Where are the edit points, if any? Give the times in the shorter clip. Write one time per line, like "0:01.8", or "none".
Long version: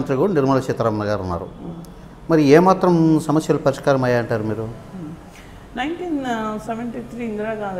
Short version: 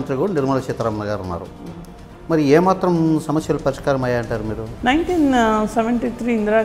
0:04.7